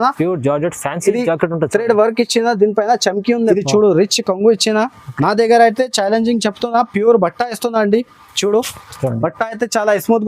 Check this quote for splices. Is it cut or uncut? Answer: cut